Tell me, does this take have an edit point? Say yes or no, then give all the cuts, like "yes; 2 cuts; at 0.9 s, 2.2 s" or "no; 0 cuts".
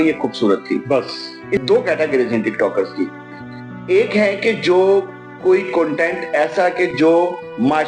yes; 1 cut; at 1.6 s